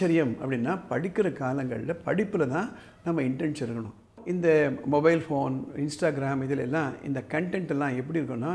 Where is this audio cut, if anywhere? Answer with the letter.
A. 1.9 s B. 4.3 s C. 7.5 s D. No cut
B